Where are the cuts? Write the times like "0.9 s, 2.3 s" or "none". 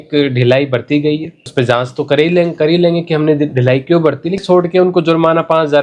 1.5 s, 4.4 s